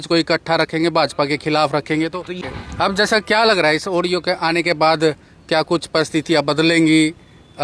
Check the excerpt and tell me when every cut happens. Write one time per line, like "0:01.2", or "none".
0:02.4